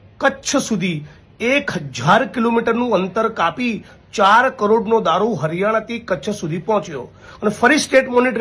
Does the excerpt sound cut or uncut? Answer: uncut